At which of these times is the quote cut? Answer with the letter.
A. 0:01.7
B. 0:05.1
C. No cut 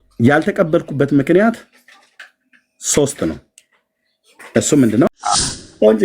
B